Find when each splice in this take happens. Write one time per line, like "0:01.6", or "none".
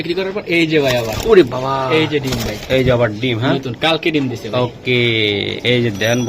none